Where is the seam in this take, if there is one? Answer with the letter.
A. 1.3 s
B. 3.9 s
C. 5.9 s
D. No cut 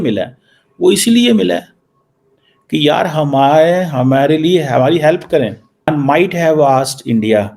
C